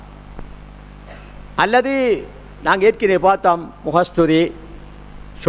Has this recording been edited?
no; 0 cuts

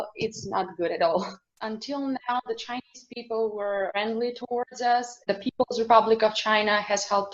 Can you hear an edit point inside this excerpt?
yes; 2 cuts; at 1.5 s, 5.2 s

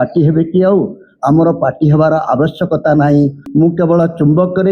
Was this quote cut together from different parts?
yes; 1 cut; at 3.4 s

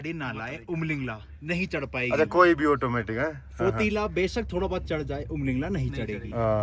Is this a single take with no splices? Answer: yes; 0 cuts

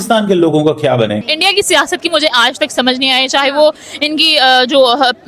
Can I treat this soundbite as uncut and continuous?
no; 1 cut; at 1.1 s

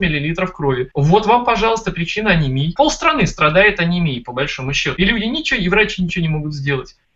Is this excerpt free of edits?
no; 1 cut; at 4.9 s

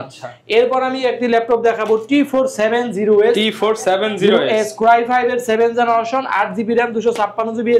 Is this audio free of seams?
yes; 0 cuts

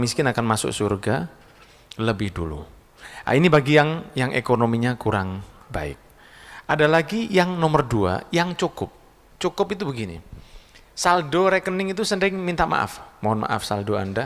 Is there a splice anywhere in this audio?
no; 0 cuts

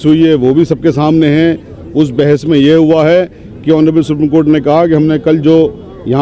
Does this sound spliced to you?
no; 0 cuts

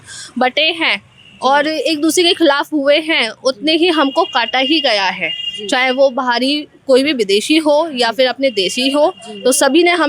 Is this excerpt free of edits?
yes; 0 cuts

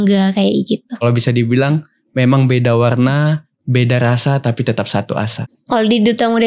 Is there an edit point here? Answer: yes; 2 cuts; at 1.0 s, 5.4 s

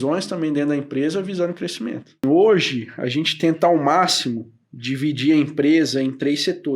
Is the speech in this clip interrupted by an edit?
yes; 1 cut; at 2.2 s

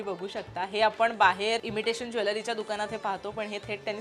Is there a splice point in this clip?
yes; 1 cut; at 1.6 s

